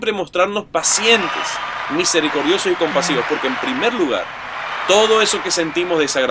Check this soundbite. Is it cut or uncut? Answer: uncut